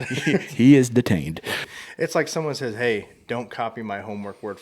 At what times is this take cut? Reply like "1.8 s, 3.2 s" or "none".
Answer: 1.6 s